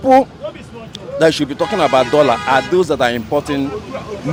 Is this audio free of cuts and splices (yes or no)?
yes